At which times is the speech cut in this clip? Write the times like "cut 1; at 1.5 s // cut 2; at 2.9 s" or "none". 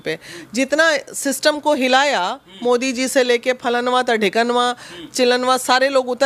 none